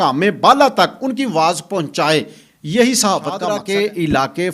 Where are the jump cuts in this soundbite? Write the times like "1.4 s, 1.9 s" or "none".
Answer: 3.6 s

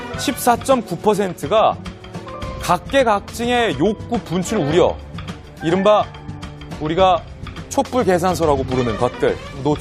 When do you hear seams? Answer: none

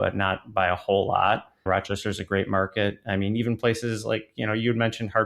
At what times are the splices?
1.6 s

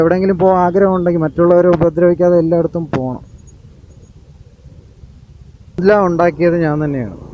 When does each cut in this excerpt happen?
5.8 s

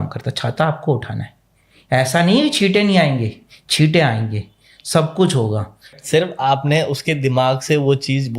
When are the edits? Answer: 6.0 s

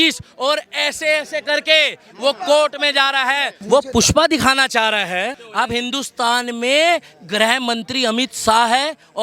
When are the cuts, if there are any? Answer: 3.5 s, 5.4 s

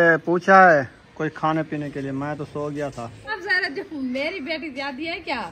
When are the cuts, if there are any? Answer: 3.3 s

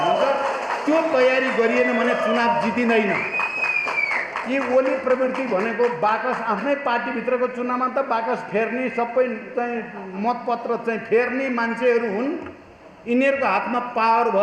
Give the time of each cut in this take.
none

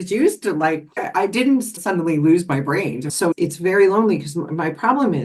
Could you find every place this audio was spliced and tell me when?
3.1 s

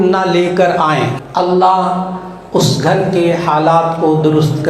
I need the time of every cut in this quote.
1.1 s

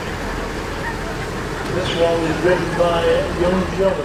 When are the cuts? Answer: none

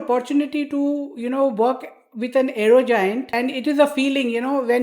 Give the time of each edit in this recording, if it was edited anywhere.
3.3 s

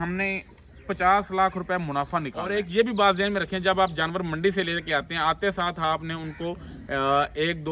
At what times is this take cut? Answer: 2.4 s

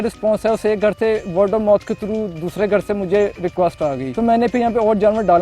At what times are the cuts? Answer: 4.1 s

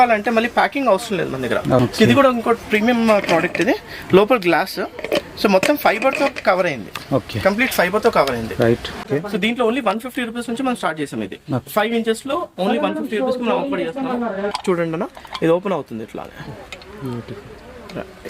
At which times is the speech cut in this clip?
1.8 s, 9.0 s, 14.5 s

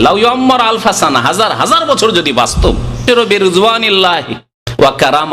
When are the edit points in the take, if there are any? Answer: 3.0 s

